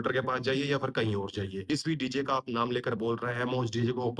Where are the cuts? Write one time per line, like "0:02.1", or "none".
0:01.5

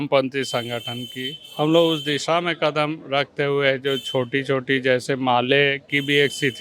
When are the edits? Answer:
none

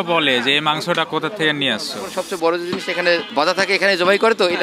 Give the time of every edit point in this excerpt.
0:02.1
0:03.3

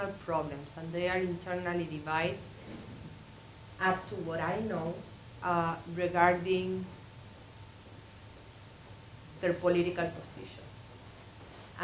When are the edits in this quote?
0:01.4

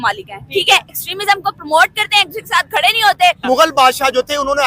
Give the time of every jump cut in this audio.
0:03.4

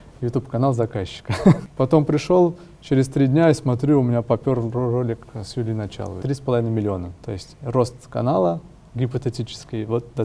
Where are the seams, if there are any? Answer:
0:01.7
0:06.2

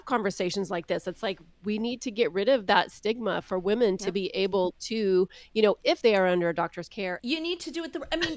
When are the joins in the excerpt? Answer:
0:07.2

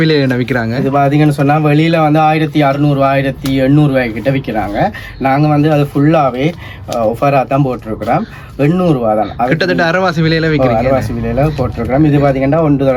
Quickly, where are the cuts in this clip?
none

